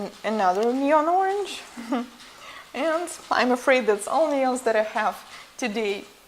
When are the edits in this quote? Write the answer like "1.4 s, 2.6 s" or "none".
none

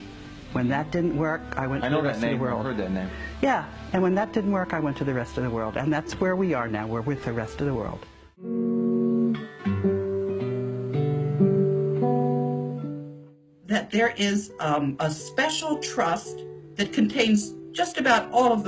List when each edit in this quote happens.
7.5 s

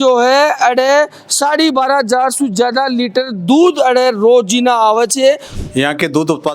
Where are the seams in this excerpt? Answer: 5.5 s

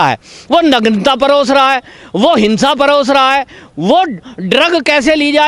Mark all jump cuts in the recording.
none

